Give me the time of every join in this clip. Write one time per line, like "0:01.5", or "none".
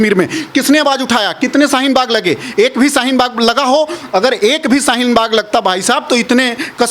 none